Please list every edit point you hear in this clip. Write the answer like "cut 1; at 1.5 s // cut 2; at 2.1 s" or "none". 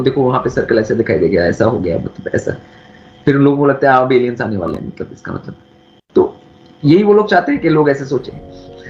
none

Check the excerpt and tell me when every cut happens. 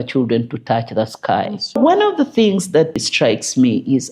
cut 1; at 1.8 s // cut 2; at 3.0 s

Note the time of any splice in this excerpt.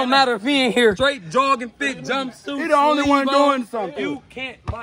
cut 1; at 1.0 s // cut 2; at 3.9 s

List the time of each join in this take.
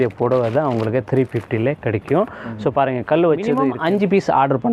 cut 1; at 3.7 s

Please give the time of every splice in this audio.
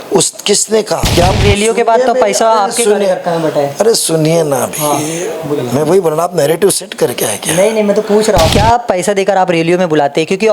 cut 1; at 1.1 s // cut 2; at 8.5 s

